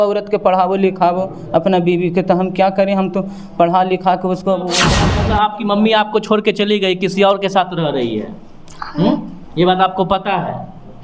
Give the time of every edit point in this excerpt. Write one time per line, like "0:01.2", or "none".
0:05.0